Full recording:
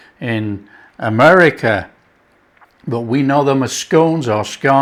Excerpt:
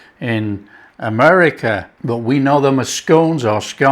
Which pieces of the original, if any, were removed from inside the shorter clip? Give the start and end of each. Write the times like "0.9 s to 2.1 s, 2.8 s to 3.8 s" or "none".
1.9 s to 2.7 s